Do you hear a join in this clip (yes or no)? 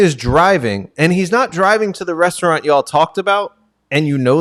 no